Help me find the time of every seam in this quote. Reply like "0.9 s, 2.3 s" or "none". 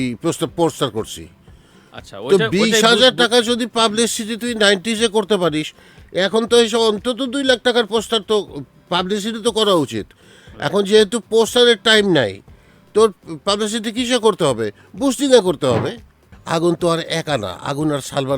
16.3 s